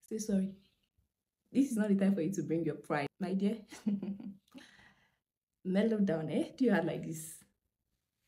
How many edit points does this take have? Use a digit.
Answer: 1